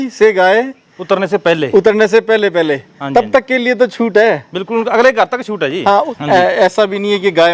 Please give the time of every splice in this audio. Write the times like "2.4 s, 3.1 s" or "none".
6.1 s